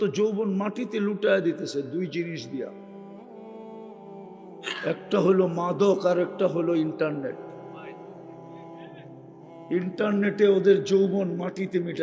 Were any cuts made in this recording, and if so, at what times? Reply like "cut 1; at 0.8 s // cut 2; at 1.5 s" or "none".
cut 1; at 8.0 s // cut 2; at 9.7 s